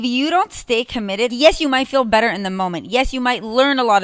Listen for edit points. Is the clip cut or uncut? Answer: cut